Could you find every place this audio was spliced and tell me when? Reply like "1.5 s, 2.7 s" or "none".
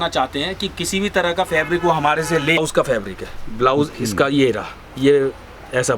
2.6 s